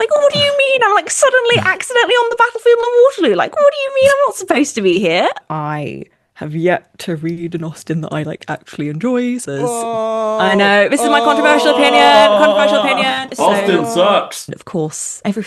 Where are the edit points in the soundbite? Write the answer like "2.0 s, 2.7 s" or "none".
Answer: 5.4 s, 9.4 s, 13.3 s, 14.5 s

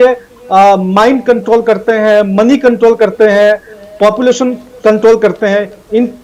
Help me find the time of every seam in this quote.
none

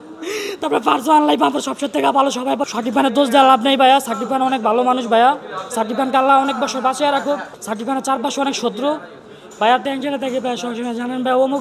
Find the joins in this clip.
2.6 s, 7.5 s

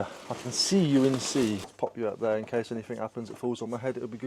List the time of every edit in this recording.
1.7 s

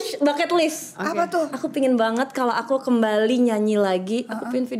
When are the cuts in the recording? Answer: none

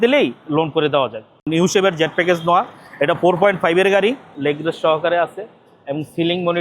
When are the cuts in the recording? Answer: 1.5 s, 4.3 s

